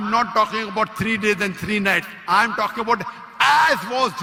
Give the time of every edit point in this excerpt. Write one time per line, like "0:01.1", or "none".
none